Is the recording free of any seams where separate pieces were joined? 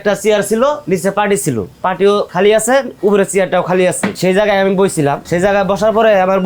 no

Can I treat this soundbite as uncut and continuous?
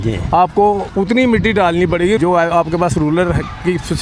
no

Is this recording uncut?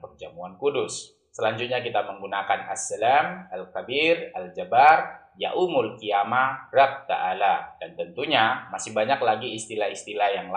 no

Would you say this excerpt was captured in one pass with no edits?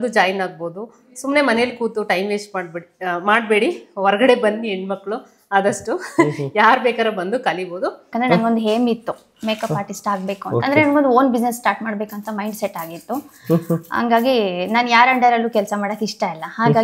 no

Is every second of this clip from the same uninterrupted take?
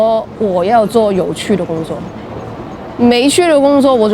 yes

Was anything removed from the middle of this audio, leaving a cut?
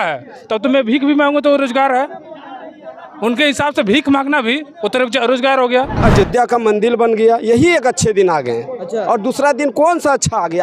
yes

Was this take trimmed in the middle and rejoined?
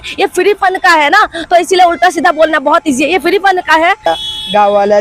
yes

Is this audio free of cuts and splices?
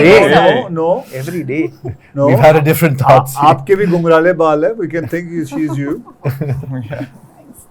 yes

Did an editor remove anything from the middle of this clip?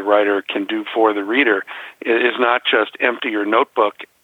no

